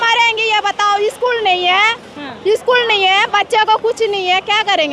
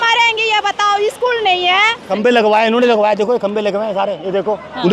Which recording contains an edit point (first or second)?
second